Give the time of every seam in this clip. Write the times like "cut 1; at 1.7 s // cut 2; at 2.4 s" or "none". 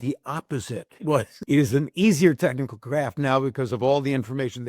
cut 1; at 1.0 s

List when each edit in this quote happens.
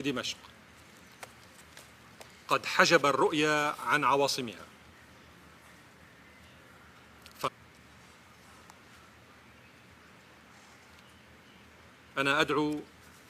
none

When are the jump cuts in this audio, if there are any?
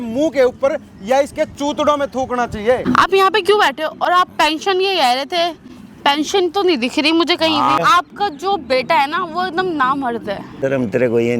cut 1; at 2.8 s // cut 2; at 7.8 s // cut 3; at 10.5 s

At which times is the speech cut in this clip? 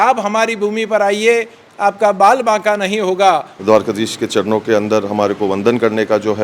cut 1; at 3.5 s

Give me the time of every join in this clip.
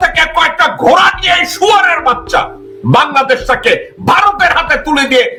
none

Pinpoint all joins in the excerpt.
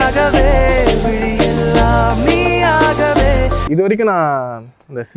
cut 1; at 3.6 s

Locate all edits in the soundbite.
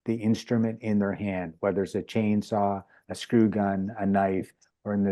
none

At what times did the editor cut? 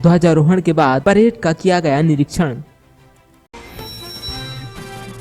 cut 1; at 3.5 s

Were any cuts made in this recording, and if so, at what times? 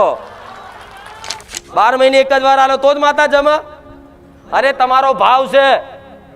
cut 1; at 1.5 s

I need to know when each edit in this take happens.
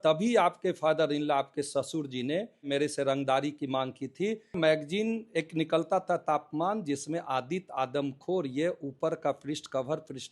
cut 1; at 2.7 s // cut 2; at 4.6 s

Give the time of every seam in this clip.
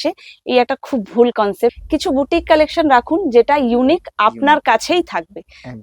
cut 1; at 1.8 s

